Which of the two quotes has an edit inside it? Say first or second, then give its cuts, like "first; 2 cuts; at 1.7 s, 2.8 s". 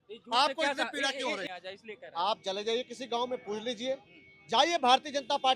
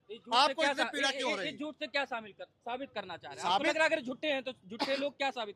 first; 1 cut; at 1.5 s